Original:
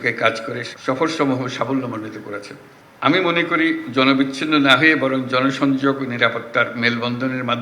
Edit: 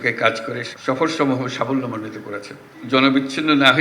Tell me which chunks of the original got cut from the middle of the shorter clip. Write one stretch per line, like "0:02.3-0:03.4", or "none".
0:02.8-0:03.9